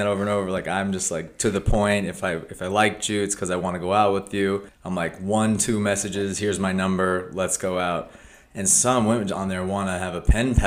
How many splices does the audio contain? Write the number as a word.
one